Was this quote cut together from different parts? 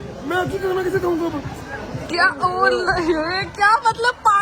no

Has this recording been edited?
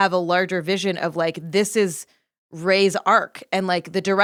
no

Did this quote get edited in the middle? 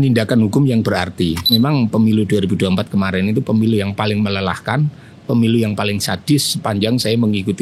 yes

